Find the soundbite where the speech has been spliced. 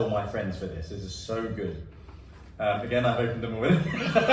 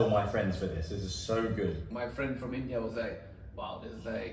second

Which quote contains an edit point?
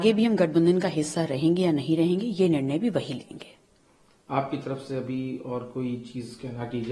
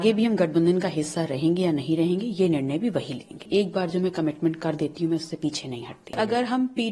second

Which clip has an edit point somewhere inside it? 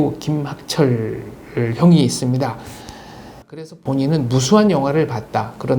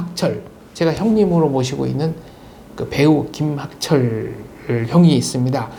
first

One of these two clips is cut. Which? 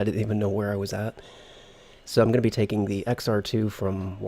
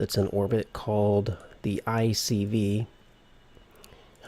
second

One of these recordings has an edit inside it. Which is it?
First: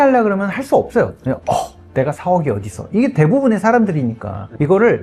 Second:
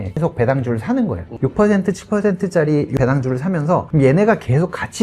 second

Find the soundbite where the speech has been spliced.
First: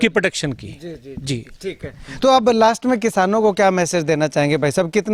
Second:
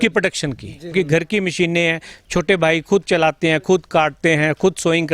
second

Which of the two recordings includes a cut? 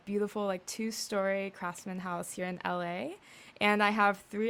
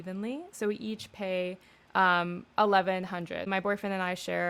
second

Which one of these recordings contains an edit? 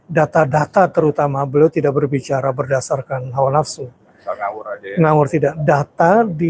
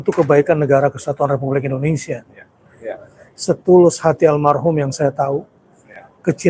second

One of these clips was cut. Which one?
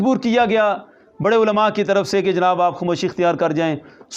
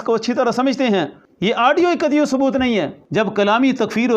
second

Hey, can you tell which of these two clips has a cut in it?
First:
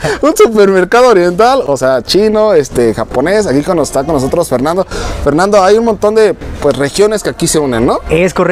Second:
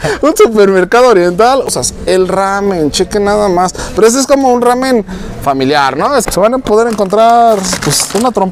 second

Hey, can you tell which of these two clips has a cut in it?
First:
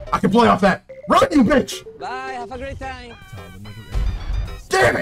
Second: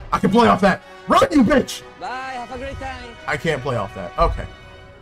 first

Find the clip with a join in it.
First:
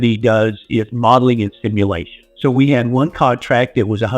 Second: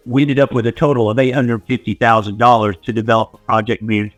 first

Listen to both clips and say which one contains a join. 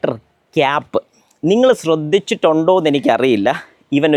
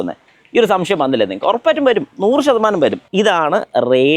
second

